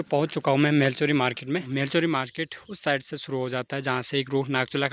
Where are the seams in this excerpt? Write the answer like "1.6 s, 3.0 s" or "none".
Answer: none